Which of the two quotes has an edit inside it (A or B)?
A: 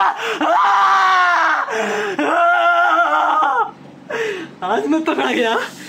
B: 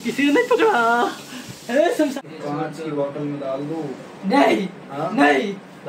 B